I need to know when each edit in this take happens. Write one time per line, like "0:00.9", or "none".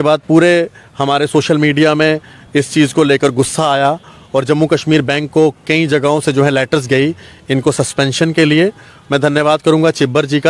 none